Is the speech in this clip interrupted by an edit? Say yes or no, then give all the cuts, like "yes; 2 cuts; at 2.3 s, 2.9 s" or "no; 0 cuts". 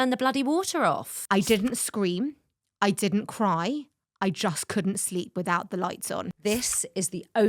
yes; 2 cuts; at 1.2 s, 6.3 s